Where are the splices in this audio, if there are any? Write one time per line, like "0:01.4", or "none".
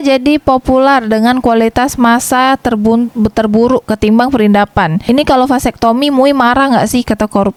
none